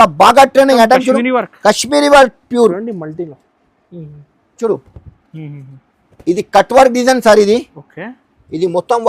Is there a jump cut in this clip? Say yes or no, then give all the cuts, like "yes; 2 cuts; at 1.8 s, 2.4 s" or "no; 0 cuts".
yes; 1 cut; at 4.6 s